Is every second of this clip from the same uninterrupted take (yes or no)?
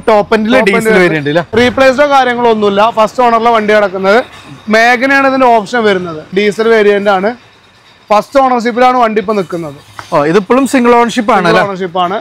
no